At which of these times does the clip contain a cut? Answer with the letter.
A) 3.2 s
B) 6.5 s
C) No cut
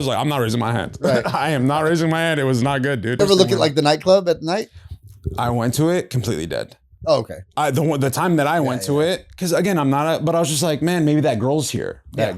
A